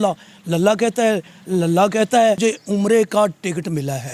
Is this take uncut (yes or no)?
no